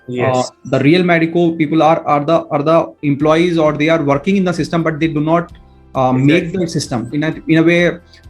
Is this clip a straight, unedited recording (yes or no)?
no